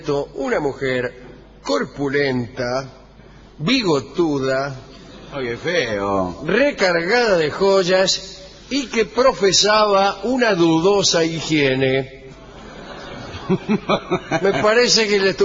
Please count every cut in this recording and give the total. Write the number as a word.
zero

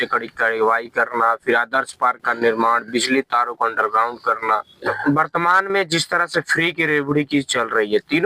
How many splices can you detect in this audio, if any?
one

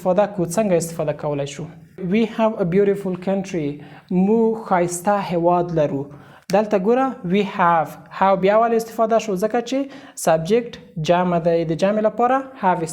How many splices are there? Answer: one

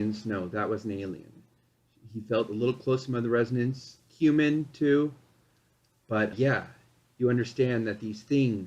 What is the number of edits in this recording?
one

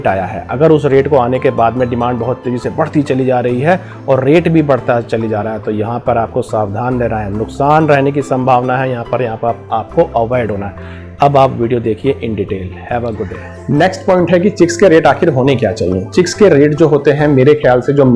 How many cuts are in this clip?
one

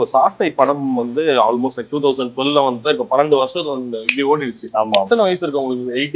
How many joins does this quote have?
one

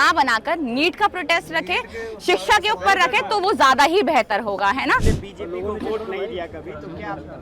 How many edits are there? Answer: one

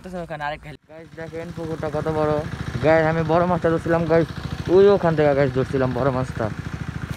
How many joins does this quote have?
one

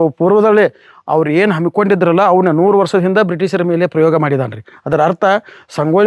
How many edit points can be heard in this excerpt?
zero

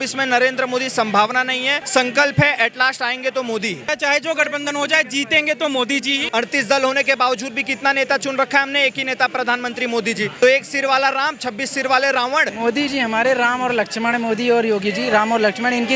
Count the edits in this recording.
five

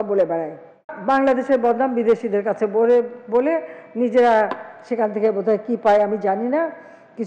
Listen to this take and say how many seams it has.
one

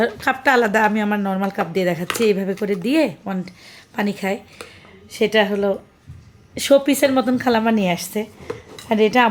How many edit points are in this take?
zero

